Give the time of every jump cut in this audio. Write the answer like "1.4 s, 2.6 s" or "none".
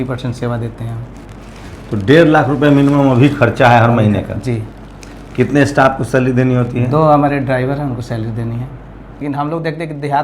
9.2 s